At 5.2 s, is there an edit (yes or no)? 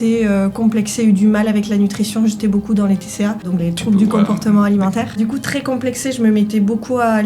yes